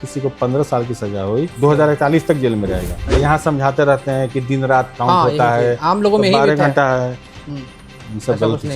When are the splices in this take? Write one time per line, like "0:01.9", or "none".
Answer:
0:01.5
0:03.0